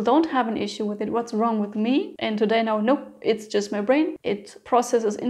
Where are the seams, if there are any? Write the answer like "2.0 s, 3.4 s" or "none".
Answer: 2.1 s, 4.2 s

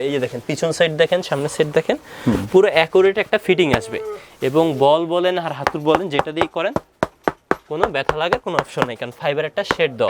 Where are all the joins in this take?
none

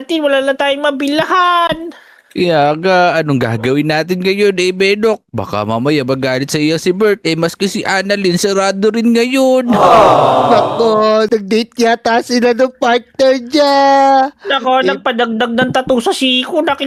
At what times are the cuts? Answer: none

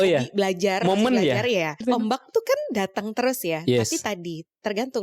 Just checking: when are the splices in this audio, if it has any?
1.8 s

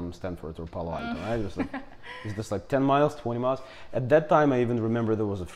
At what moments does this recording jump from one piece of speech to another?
none

